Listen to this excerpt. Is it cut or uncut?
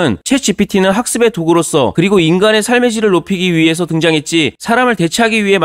uncut